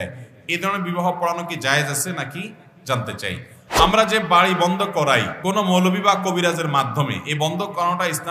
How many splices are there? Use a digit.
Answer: 2